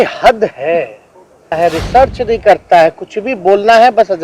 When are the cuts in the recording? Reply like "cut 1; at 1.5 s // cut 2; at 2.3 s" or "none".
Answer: cut 1; at 1.5 s